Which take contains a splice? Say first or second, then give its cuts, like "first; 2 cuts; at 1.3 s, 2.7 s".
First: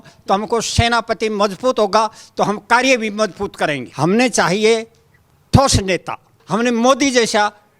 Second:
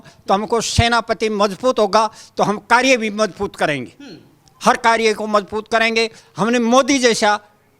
first; 2 cuts; at 3.9 s, 6.3 s